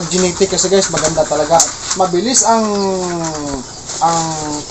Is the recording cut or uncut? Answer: uncut